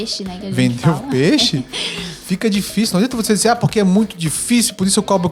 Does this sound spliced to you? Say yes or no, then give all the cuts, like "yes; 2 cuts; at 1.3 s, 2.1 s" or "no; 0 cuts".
no; 0 cuts